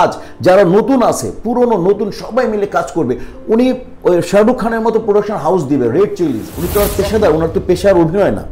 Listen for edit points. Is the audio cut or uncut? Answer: cut